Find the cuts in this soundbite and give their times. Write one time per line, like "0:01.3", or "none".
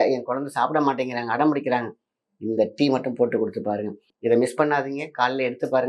0:04.1

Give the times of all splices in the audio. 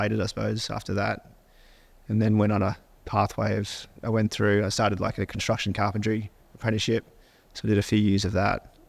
none

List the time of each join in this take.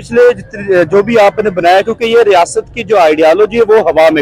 none

